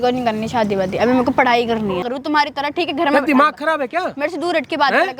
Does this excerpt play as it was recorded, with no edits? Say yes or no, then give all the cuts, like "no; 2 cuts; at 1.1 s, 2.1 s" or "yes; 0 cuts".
no; 1 cut; at 2.1 s